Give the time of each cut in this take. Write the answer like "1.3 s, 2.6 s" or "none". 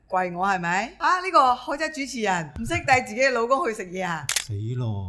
1.0 s, 2.5 s, 4.3 s